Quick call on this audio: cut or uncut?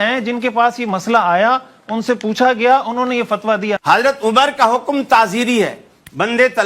cut